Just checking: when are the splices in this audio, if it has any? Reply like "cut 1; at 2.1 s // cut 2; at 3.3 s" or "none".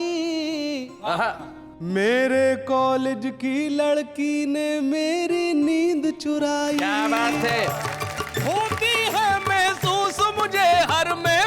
cut 1; at 7.8 s